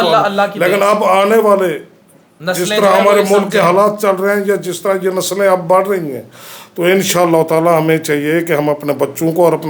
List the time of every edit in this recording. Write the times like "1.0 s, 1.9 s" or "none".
none